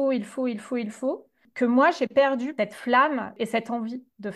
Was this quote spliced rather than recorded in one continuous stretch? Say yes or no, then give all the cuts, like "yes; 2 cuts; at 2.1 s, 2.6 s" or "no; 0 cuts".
yes; 3 cuts; at 1.4 s, 2.5 s, 3.3 s